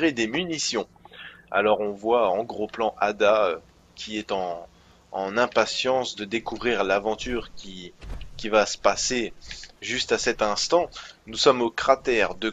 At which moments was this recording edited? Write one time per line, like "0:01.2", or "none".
0:06.8